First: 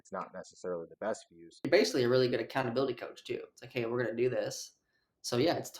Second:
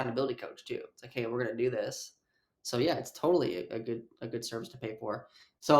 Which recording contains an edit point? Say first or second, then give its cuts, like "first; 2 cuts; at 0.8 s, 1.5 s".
first; 1 cut; at 1.6 s